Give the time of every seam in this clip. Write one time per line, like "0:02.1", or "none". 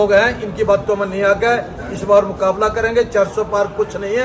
none